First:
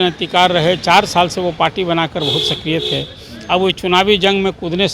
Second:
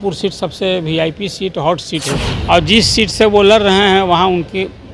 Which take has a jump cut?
second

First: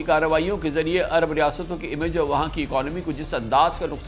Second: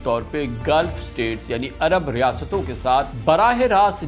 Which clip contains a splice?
second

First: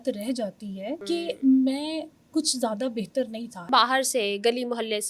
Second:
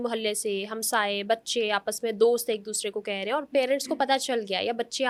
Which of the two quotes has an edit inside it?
first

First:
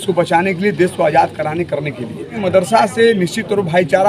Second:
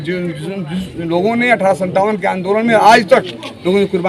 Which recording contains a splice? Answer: first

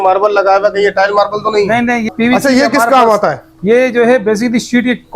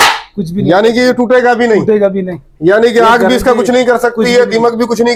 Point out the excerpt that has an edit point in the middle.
first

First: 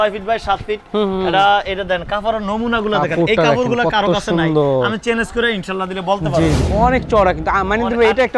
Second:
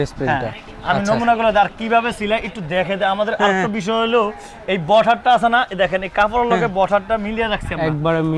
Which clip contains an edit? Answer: first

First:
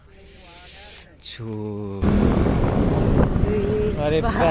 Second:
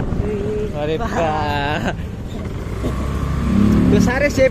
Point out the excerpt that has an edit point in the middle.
first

